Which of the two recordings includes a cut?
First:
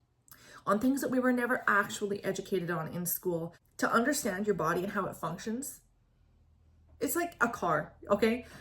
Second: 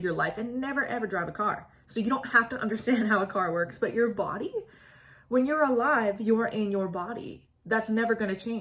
first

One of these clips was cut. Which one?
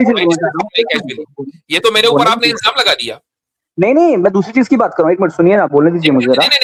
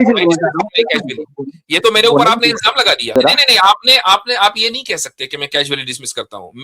second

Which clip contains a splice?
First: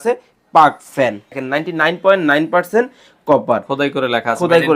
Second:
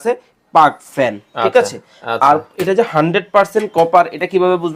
first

